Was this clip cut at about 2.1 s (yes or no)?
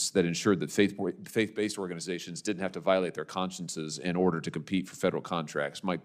no